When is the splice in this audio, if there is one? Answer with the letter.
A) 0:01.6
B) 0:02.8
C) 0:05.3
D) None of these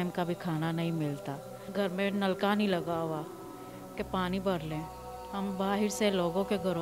A